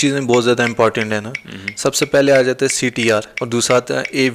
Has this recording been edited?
yes; 1 cut; at 3.3 s

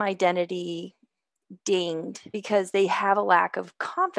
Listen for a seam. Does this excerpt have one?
yes; 1 cut; at 2.4 s

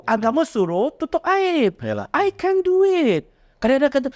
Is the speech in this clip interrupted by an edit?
no; 0 cuts

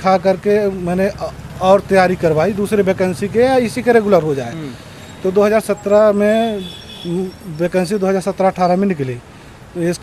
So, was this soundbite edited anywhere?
no; 0 cuts

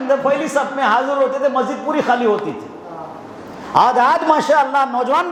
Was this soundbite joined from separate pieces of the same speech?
no; 0 cuts

